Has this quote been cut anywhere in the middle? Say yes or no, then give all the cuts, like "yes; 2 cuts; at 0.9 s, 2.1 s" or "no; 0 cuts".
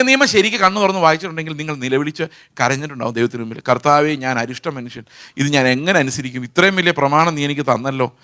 no; 0 cuts